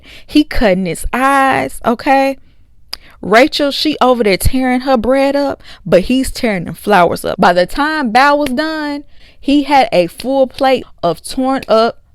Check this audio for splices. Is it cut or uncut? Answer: cut